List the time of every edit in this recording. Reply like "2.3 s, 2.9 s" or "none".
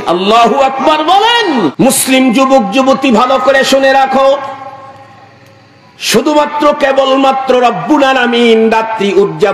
1.7 s